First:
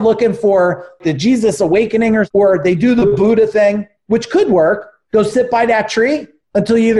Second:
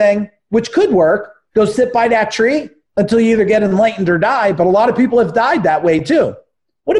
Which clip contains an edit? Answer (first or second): first